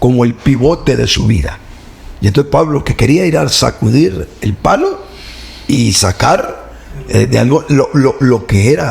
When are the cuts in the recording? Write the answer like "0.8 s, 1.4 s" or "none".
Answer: none